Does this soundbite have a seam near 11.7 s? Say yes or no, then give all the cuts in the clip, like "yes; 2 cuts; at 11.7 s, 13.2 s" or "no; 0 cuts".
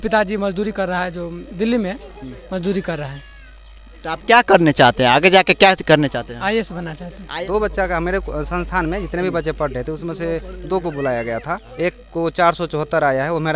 yes; 2 cuts; at 7.3 s, 11.7 s